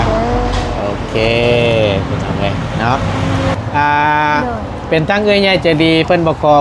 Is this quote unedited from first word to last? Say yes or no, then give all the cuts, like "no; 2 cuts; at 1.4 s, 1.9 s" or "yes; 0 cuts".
no; 1 cut; at 3.5 s